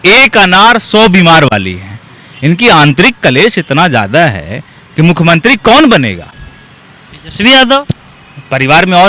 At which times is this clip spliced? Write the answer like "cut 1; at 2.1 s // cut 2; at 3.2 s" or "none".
none